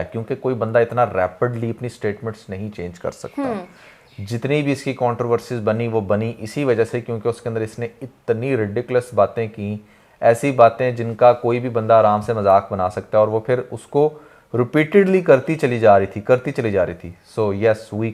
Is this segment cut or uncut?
uncut